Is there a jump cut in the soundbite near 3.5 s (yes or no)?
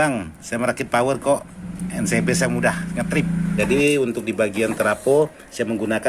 yes